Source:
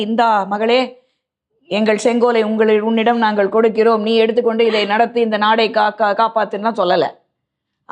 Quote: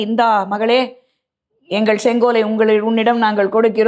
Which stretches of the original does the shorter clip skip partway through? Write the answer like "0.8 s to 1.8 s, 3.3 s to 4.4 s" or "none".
none